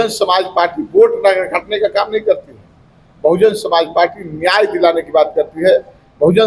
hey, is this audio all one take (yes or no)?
yes